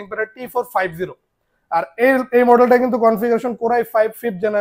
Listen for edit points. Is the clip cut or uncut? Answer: uncut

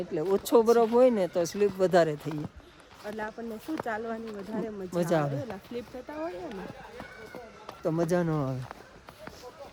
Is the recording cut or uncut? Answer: uncut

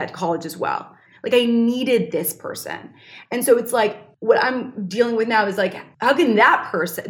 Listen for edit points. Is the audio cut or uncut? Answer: cut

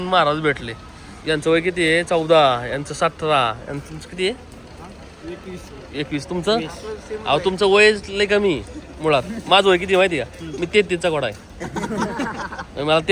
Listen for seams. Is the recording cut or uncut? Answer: uncut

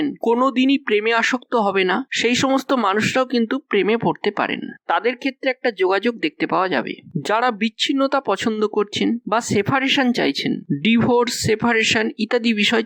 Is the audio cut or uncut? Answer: uncut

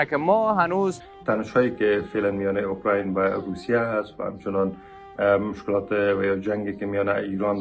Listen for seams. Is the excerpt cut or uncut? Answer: cut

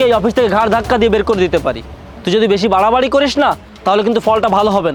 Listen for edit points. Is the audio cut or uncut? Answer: uncut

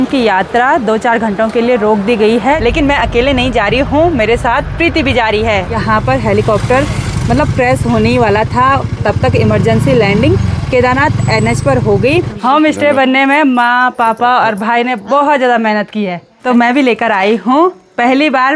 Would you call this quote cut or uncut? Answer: cut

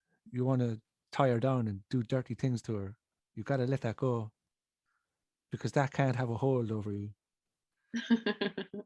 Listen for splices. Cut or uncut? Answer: uncut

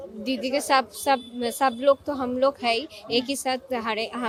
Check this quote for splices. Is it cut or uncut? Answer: uncut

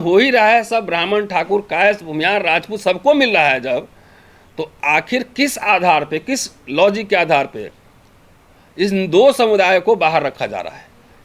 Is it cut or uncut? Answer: uncut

